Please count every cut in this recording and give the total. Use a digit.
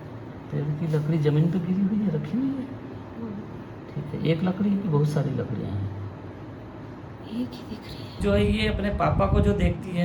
1